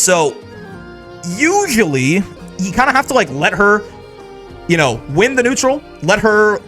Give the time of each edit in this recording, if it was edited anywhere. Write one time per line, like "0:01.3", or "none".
0:02.3

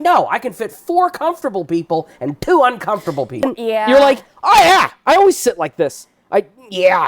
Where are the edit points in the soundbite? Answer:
0:03.4

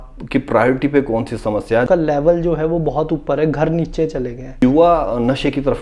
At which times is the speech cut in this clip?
0:01.9
0:04.6

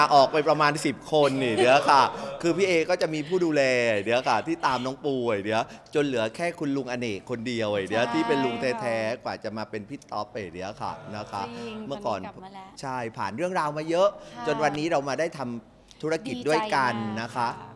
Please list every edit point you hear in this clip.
none

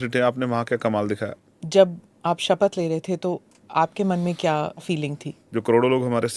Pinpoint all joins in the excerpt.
0:01.3
0:04.8

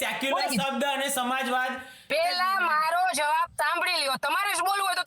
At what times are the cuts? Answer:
0:01.9

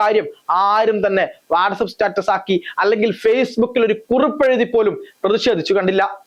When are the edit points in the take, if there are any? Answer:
none

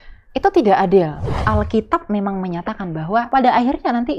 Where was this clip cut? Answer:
0:01.3
0:03.3

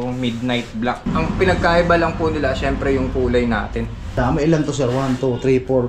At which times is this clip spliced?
0:01.1
0:04.2

